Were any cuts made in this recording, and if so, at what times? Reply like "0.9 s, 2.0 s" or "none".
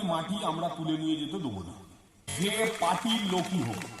2.3 s